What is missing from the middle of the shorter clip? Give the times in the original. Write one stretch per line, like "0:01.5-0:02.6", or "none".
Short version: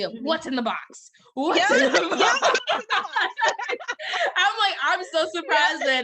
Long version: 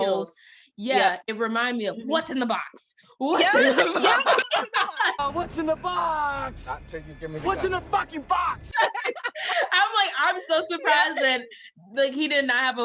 0:05.1-0:08.7